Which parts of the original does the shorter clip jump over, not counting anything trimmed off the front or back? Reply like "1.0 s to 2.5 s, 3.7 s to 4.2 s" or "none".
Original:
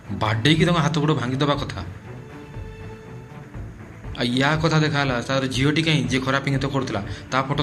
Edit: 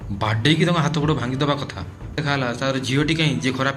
2.2 s to 4.9 s